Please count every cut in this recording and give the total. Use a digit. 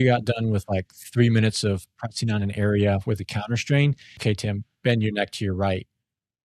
1